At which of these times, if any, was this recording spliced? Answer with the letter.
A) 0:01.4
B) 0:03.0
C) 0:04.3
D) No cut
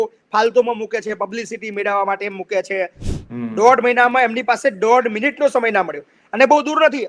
B